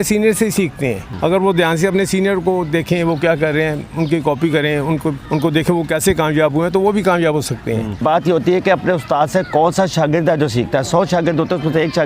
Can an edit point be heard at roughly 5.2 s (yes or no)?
yes